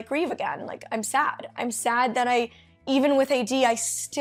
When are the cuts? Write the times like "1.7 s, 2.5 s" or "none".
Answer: none